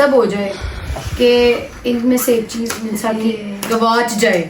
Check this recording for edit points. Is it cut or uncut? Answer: uncut